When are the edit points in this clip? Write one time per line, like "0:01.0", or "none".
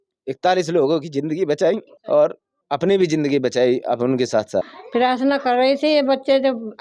0:01.9
0:02.5
0:04.8